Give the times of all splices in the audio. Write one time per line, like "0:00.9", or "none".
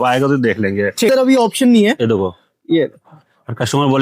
0:01.1